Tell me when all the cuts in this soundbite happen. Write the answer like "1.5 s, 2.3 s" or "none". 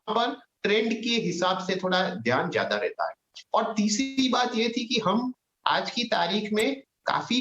none